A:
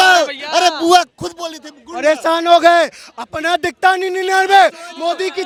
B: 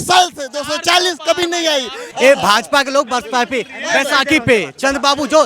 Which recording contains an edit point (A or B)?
B